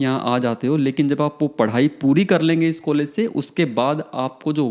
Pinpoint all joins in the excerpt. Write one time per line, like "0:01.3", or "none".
none